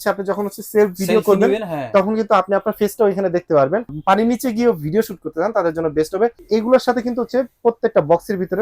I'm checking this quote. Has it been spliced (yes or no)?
yes